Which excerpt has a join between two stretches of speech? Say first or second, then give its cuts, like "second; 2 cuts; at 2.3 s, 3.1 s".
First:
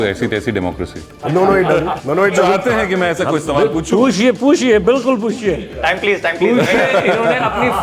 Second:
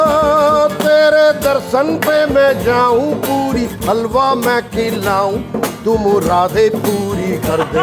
first; 2 cuts; at 1.1 s, 2.1 s